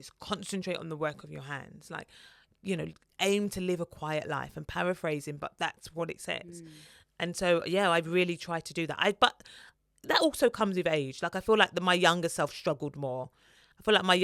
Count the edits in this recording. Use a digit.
0